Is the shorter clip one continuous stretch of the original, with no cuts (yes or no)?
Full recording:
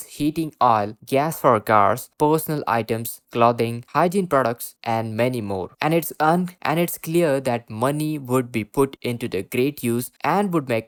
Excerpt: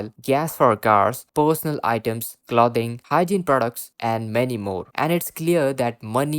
no